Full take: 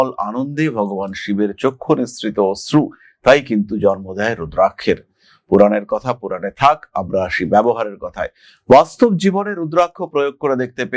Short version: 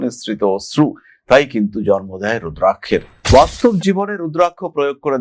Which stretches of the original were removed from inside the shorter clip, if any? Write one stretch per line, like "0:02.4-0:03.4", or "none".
0:05.1-0:08.5